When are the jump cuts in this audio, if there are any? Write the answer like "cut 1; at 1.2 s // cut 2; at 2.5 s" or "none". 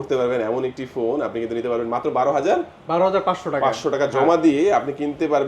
none

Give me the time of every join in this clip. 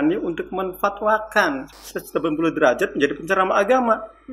cut 1; at 1.7 s

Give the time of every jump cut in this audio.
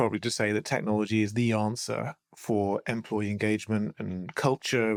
none

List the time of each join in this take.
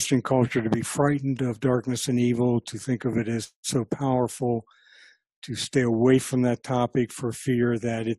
none

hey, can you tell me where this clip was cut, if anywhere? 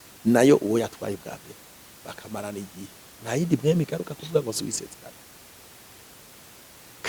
none

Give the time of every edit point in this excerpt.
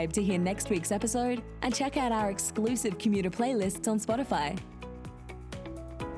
none

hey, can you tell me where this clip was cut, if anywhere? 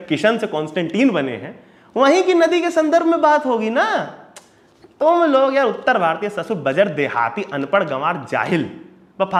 none

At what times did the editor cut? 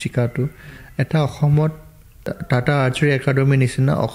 cut 1; at 2.4 s

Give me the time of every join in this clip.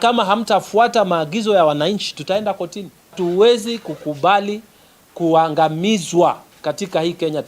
cut 1; at 3.1 s

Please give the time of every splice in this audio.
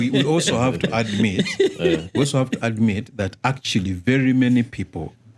none

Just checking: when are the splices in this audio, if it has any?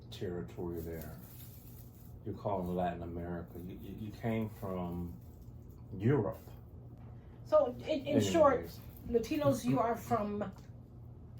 cut 1; at 7.3 s

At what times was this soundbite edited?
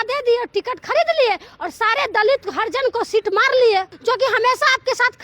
cut 1; at 3.9 s

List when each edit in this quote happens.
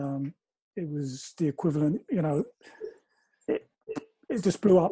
none

